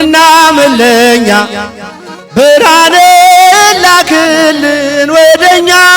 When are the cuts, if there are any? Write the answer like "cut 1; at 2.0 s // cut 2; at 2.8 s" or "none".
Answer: none